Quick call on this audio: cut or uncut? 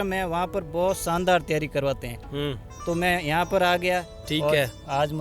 cut